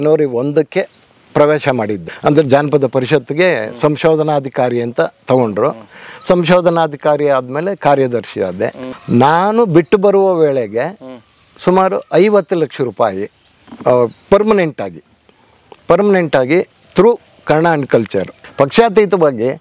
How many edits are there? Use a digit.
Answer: 3